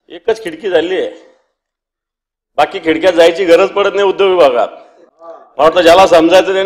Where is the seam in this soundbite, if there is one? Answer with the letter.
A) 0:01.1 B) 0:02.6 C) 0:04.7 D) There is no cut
D